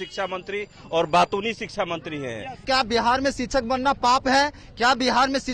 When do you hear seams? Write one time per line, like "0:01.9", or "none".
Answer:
0:02.6